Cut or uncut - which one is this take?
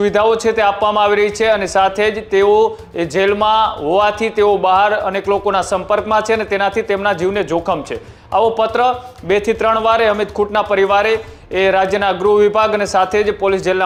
uncut